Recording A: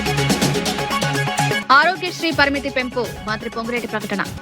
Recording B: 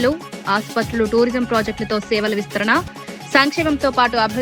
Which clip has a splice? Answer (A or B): A